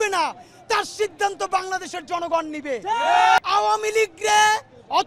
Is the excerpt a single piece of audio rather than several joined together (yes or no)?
no